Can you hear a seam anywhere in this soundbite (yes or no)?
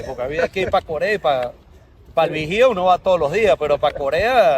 no